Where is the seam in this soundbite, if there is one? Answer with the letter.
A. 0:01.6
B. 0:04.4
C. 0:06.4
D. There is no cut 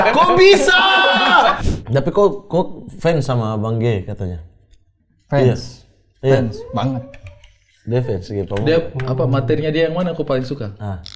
A